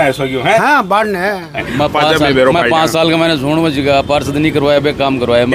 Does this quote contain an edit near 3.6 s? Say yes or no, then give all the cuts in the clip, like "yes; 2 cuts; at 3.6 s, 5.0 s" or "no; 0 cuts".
no; 1 cut; at 1.6 s